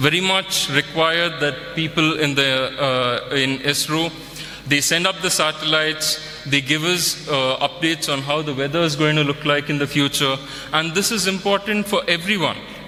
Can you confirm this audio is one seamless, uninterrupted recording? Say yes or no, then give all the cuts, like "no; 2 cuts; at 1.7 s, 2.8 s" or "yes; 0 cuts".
yes; 0 cuts